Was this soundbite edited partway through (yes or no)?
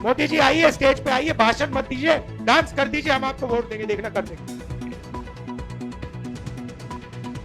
yes